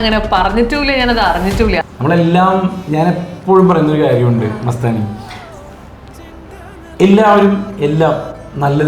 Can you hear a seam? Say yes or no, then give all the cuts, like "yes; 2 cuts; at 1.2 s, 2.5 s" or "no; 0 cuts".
yes; 1 cut; at 1.9 s